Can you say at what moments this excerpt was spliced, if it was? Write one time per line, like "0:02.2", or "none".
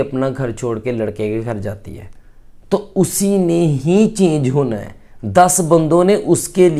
none